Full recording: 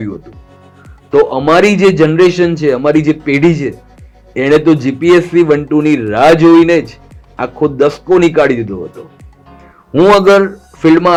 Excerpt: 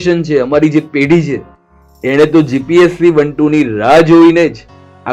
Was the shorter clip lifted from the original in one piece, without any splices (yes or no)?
yes